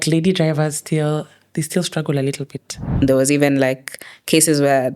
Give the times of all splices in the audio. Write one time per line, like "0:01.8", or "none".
0:03.0